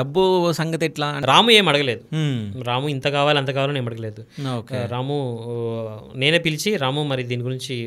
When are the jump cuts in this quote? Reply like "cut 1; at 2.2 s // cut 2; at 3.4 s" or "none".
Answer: cut 1; at 1.1 s